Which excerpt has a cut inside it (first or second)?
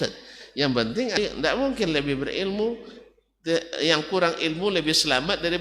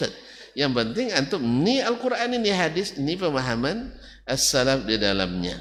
first